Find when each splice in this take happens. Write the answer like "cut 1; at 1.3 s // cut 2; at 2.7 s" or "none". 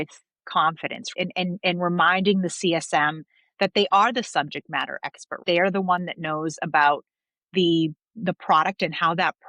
cut 1; at 1.1 s // cut 2; at 5.4 s